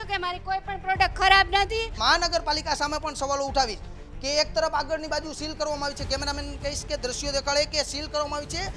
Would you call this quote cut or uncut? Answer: cut